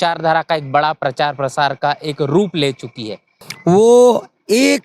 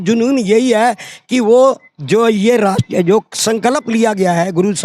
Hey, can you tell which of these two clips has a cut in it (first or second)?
first